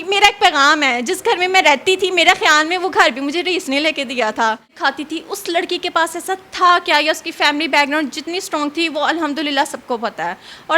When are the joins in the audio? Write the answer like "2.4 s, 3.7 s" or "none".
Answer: 4.7 s